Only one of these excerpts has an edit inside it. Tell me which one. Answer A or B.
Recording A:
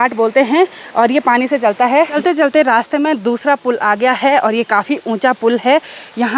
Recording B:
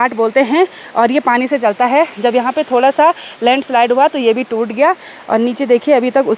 A